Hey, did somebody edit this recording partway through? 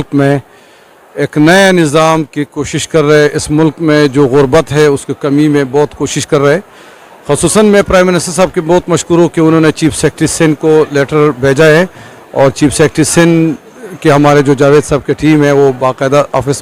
no; 0 cuts

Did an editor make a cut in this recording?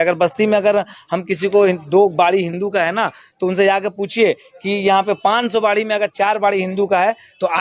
no; 0 cuts

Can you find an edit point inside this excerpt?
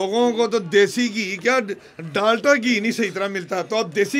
no; 0 cuts

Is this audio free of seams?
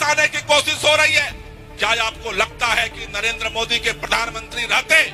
yes; 0 cuts

